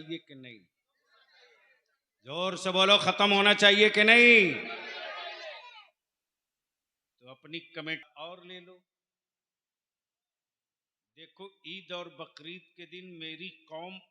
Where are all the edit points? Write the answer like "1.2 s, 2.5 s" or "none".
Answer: 8.0 s